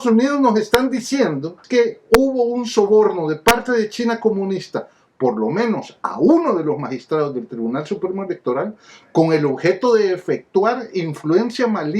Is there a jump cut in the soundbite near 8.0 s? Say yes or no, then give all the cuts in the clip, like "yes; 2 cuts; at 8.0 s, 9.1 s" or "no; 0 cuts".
no; 1 cut; at 1.6 s